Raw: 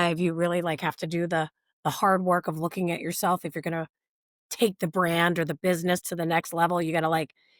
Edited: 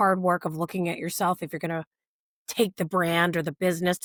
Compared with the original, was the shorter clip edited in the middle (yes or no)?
no